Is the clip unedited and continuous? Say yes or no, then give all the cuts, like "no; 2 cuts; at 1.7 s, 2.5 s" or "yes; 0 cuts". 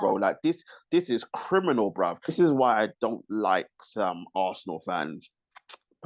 no; 1 cut; at 2.3 s